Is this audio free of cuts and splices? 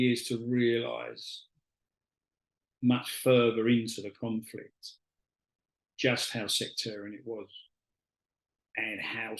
yes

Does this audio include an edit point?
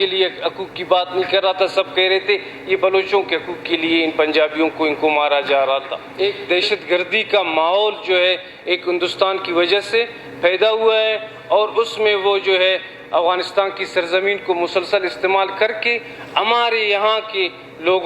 yes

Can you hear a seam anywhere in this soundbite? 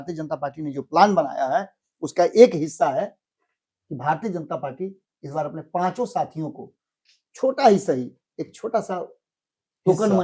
no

